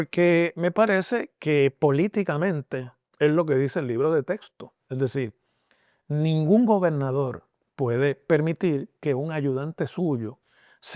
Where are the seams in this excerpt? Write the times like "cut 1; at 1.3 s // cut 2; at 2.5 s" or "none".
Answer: none